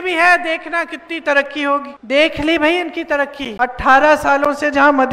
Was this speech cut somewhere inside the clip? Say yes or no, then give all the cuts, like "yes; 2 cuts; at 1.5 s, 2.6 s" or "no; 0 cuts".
yes; 2 cuts; at 1.9 s, 3.4 s